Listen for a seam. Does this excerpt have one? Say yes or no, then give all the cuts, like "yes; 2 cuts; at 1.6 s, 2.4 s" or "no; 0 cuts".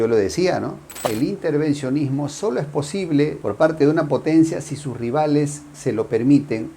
yes; 1 cut; at 1.0 s